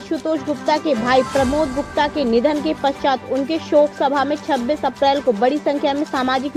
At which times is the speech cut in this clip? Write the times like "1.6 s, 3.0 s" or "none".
none